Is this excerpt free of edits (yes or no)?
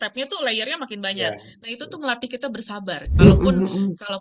no